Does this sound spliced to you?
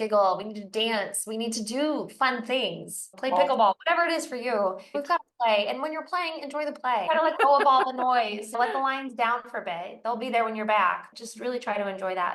yes; 5 cuts; at 3.1 s, 4.9 s, 7.0 s, 8.6 s, 11.1 s

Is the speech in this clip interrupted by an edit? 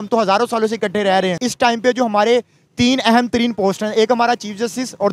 yes; 1 cut; at 1.4 s

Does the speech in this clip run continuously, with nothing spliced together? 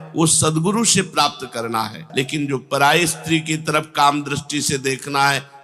no; 1 cut; at 2.0 s

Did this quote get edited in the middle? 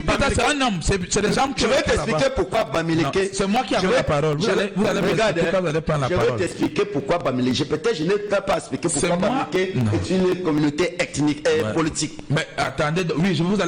no; 0 cuts

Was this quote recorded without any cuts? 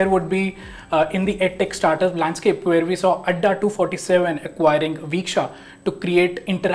yes; 0 cuts

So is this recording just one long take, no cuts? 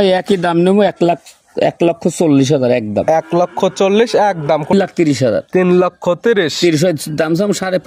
no; 1 cut; at 4.7 s

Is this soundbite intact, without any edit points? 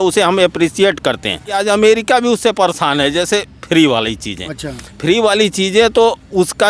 no; 1 cut; at 1.6 s

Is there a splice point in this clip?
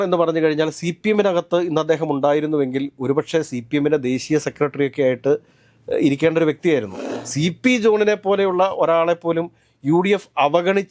yes; 1 cut; at 7.0 s

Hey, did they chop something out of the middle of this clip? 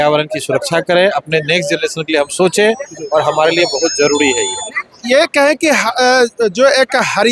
no; 0 cuts

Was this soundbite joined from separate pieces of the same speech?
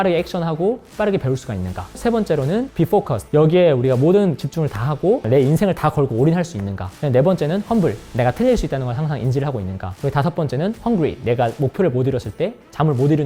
no; 0 cuts

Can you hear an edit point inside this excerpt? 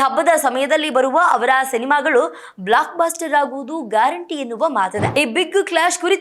yes; 1 cut; at 5.0 s

